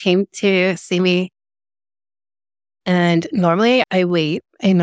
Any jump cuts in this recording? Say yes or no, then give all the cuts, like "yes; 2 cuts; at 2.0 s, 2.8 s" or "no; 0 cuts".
no; 0 cuts